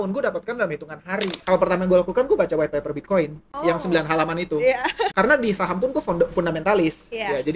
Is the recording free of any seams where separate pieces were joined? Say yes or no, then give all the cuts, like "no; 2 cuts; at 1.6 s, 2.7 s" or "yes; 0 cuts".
no; 3 cuts; at 1.4 s, 3.4 s, 5.1 s